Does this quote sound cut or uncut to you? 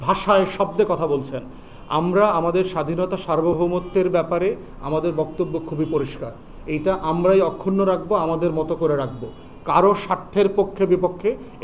uncut